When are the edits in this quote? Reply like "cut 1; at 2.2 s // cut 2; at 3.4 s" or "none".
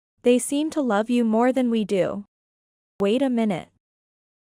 cut 1; at 3.0 s